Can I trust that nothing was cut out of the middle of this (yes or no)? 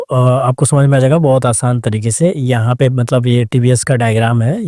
yes